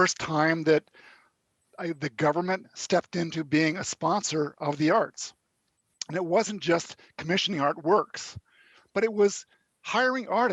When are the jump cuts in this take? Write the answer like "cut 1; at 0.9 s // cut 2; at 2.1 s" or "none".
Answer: none